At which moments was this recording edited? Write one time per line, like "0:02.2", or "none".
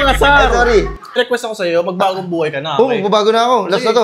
0:01.0